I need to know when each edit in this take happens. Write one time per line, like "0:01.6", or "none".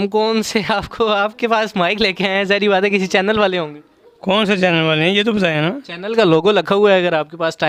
none